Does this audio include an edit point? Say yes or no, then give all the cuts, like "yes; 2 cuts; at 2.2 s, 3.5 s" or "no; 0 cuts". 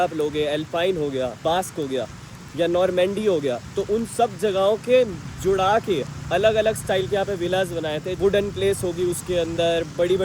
yes; 1 cut; at 1.4 s